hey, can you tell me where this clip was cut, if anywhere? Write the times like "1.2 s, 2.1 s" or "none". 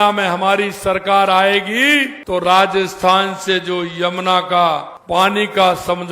2.2 s, 4.9 s